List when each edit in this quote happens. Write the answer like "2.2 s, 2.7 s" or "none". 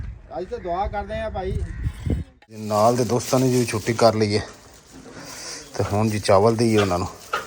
2.4 s